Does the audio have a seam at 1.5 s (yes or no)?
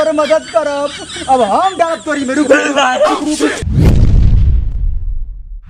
no